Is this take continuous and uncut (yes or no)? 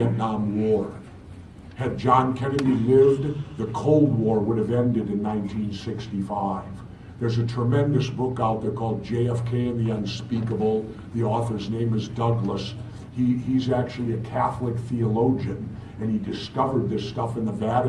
no